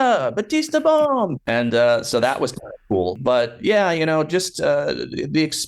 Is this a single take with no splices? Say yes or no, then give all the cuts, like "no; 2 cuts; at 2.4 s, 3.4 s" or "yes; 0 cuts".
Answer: no; 2 cuts; at 1.4 s, 3.2 s